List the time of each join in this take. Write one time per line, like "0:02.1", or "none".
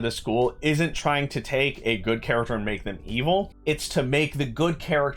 0:03.5